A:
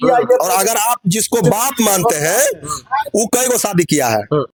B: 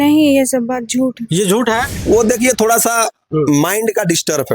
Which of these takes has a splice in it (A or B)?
B